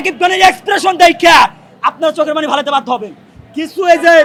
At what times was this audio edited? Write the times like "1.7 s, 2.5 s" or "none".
none